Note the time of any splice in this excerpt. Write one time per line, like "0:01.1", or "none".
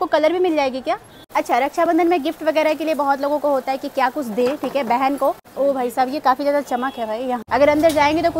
0:01.2
0:05.5
0:07.4